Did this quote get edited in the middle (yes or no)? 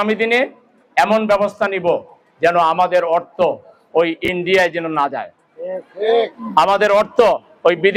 no